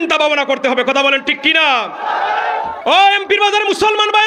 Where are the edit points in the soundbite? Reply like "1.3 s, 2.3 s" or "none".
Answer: 2.8 s